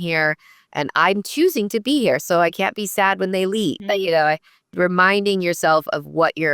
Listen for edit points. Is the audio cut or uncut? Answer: cut